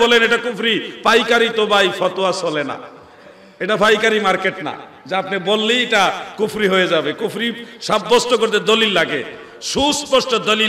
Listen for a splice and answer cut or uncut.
uncut